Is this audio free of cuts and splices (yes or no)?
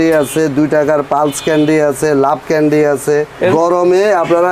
no